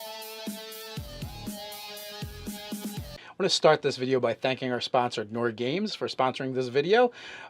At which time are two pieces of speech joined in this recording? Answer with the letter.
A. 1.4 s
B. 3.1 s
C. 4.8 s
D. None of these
B